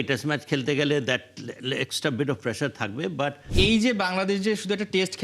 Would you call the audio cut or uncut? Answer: cut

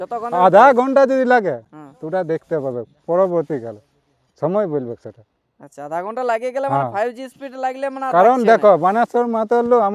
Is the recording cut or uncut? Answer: uncut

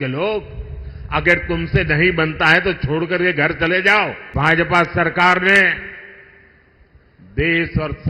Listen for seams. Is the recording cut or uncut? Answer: cut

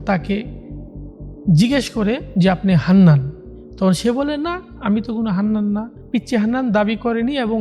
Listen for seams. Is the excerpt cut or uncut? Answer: cut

